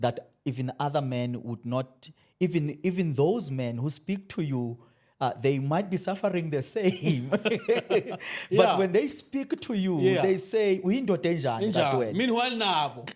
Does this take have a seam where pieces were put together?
no; 0 cuts

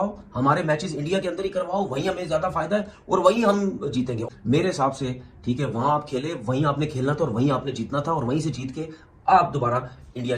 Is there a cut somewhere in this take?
yes; 1 cut; at 4.2 s

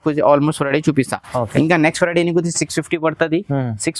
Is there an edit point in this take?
no; 0 cuts

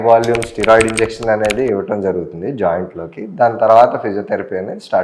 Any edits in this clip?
no; 0 cuts

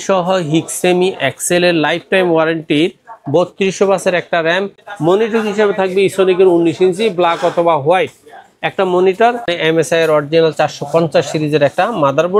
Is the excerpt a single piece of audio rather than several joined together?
no; 2 cuts; at 4.8 s, 9.5 s

